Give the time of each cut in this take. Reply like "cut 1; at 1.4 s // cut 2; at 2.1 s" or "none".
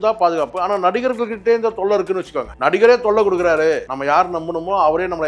cut 1; at 2.4 s // cut 2; at 3.9 s